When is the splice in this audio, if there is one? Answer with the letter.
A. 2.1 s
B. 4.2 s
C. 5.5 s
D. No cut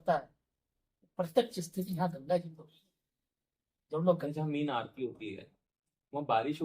B